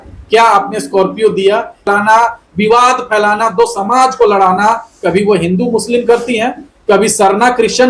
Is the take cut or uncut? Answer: cut